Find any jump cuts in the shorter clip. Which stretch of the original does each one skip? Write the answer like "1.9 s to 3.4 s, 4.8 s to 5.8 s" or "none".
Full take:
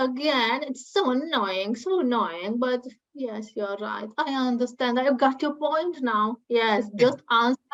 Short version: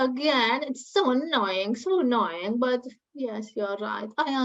none